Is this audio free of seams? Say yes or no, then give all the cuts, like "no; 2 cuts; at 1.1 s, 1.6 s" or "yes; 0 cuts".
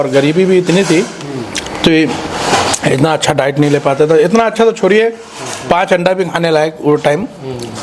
yes; 0 cuts